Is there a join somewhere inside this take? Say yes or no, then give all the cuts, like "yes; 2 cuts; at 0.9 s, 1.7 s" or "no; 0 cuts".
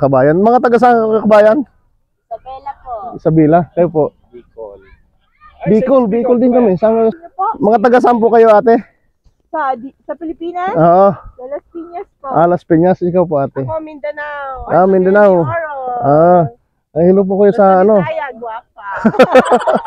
yes; 1 cut; at 7.2 s